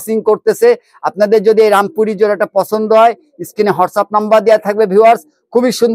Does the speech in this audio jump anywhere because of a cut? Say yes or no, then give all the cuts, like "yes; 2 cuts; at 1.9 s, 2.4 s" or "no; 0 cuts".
no; 0 cuts